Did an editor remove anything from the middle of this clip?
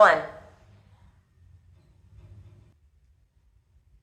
no; 0 cuts

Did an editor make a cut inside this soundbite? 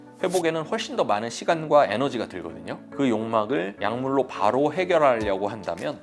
yes; 1 cut; at 2.9 s

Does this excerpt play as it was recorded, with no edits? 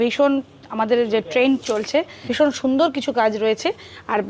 no; 1 cut; at 2.2 s

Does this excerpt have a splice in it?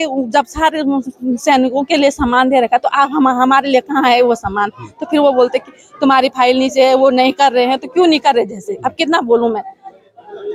no; 0 cuts

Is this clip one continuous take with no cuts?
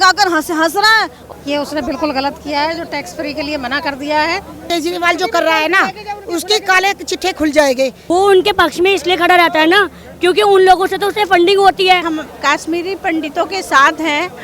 no; 4 cuts; at 1.2 s, 4.6 s, 8.0 s, 12.1 s

